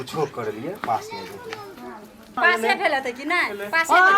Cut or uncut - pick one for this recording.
cut